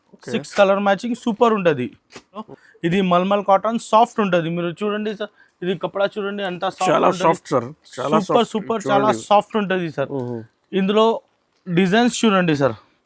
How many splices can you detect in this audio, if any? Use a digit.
1